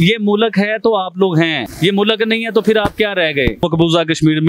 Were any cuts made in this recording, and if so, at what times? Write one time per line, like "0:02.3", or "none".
0:01.7
0:03.6

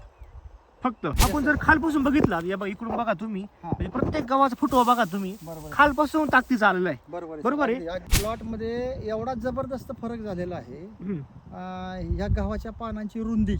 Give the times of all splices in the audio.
0:01.1
0:08.1

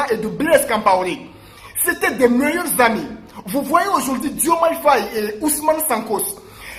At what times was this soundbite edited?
none

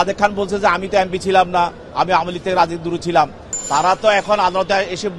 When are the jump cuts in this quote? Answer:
0:03.5

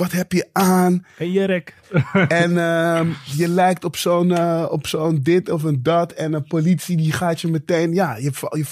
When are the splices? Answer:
0:01.8

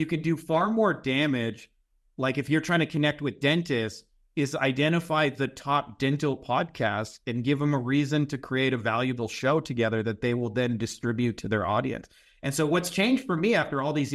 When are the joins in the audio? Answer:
none

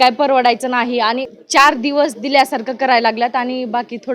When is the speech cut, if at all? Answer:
0:01.3

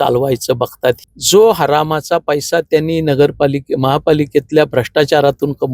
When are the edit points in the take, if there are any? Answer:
0:01.0

